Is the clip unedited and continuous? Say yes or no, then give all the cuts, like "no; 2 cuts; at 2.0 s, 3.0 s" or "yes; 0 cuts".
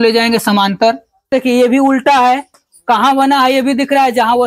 no; 1 cut; at 1.3 s